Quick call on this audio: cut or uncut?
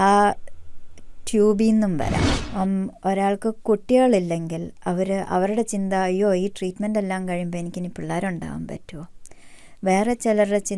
cut